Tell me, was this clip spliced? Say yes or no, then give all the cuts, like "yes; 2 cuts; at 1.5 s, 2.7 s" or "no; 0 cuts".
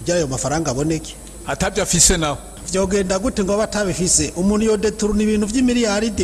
yes; 1 cut; at 2.5 s